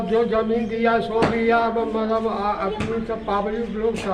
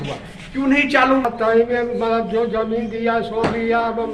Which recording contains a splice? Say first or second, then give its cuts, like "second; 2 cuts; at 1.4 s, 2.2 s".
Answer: second; 1 cut; at 1.2 s